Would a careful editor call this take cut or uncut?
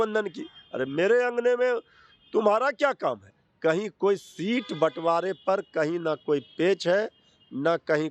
cut